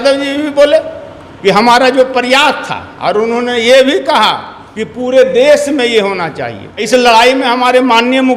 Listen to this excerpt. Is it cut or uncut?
cut